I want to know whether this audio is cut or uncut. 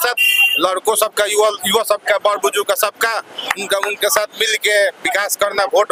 uncut